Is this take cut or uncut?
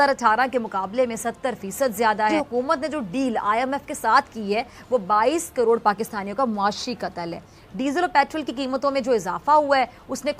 cut